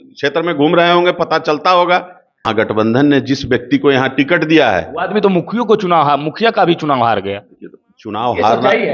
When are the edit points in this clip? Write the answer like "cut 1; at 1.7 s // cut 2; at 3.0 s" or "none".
cut 1; at 2.5 s